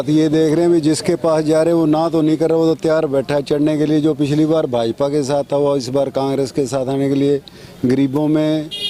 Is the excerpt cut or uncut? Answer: uncut